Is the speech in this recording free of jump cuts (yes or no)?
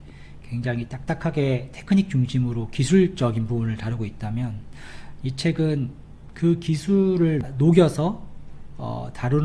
no